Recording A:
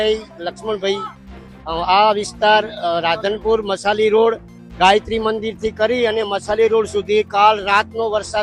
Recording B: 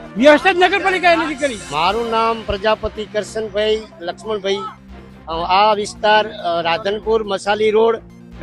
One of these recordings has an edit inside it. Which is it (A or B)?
B